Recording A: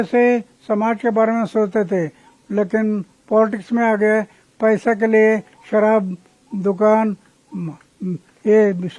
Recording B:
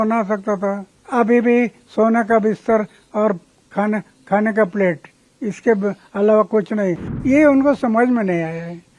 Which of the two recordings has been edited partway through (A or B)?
B